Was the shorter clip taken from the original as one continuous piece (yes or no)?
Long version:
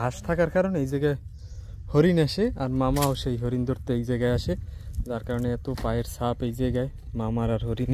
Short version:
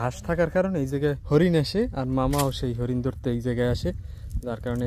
no